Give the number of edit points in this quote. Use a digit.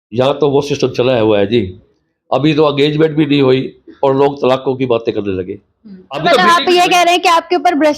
1